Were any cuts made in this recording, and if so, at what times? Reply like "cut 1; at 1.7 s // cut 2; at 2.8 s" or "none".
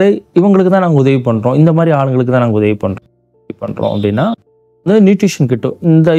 none